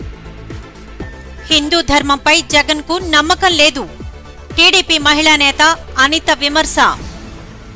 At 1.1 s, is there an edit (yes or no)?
yes